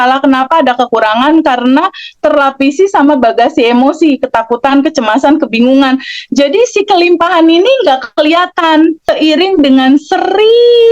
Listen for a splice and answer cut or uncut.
cut